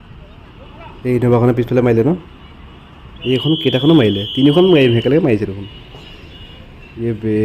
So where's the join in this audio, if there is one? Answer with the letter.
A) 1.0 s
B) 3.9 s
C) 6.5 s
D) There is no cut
A